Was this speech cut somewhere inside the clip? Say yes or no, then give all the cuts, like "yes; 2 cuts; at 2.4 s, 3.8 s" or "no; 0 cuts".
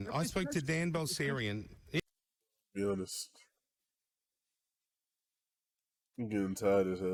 no; 0 cuts